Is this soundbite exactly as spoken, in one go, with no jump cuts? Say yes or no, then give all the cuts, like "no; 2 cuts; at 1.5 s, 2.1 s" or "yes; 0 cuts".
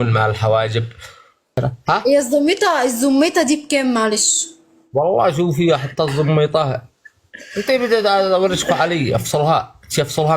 no; 1 cut; at 1.6 s